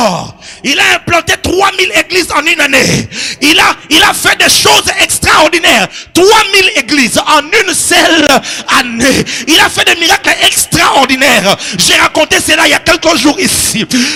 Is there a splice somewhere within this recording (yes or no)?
no